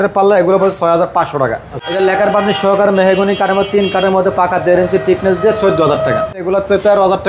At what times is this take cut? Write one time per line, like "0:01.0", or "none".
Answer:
0:01.9
0:06.5